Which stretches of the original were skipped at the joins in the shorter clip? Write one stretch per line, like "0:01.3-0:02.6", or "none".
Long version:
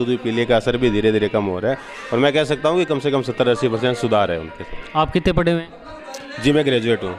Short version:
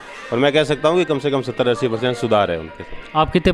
none